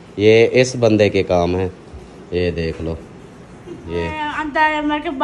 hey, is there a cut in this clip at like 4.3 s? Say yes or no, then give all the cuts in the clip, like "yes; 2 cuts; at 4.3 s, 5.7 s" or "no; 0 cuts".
yes; 1 cut; at 4.3 s